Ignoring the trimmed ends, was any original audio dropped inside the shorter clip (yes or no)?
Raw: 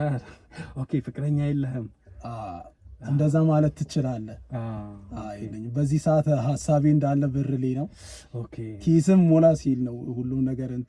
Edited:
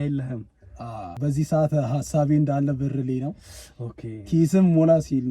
yes